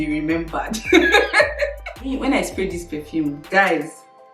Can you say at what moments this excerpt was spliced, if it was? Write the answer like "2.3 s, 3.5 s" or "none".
2.1 s